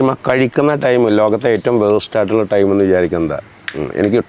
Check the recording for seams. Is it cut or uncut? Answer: uncut